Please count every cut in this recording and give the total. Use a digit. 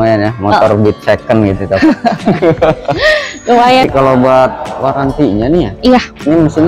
1